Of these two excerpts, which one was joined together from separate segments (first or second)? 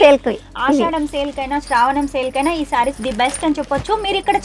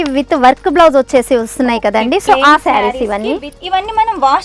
second